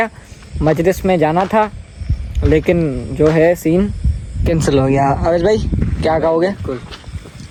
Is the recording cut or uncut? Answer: uncut